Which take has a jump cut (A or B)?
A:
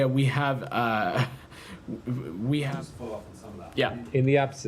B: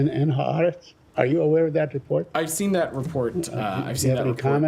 A